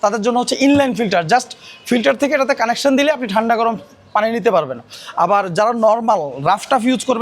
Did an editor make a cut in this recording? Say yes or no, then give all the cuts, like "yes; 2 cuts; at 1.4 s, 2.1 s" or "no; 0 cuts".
no; 0 cuts